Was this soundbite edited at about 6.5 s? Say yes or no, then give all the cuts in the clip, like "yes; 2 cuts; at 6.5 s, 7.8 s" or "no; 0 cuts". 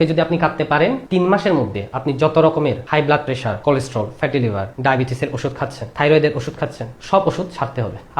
no; 3 cuts; at 1.0 s, 3.1 s, 4.7 s